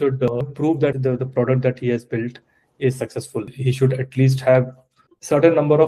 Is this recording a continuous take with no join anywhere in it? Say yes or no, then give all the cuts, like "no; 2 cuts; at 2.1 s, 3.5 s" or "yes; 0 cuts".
no; 2 cuts; at 0.7 s, 3.5 s